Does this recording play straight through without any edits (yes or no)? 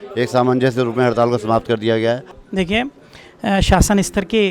no